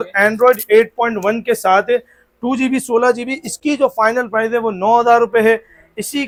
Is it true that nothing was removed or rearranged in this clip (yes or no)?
yes